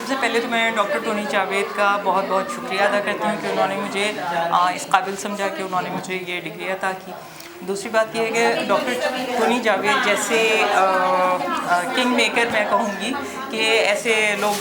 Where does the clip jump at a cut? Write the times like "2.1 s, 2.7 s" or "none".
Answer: none